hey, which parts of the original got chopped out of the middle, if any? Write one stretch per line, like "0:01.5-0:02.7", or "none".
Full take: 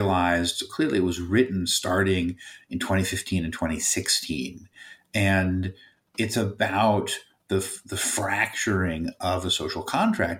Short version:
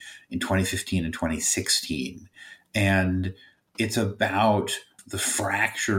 0:07.4-0:07.8